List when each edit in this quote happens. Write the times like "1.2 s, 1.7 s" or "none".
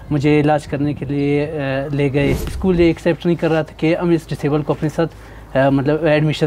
2.5 s